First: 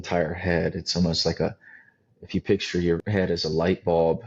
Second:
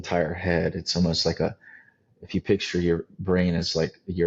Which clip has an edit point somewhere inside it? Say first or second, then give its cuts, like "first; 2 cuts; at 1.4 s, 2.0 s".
first; 1 cut; at 3.0 s